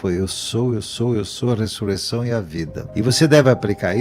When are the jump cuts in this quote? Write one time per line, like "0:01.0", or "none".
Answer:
0:02.8